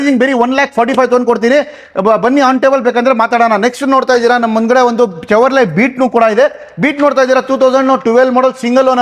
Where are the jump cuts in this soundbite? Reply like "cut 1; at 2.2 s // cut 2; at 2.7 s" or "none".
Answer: none